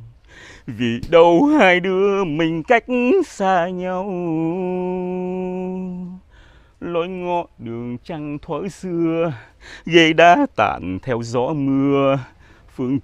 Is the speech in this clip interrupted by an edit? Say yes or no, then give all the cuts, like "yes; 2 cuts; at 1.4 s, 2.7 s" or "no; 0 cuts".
no; 0 cuts